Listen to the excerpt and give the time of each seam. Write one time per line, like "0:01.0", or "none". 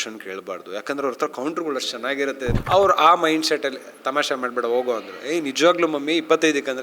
0:02.5